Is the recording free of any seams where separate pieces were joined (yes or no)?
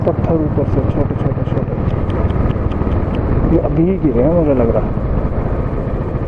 yes